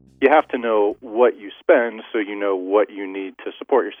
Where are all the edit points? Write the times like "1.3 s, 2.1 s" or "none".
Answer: none